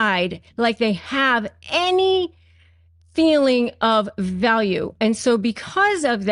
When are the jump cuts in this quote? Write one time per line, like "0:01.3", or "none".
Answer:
none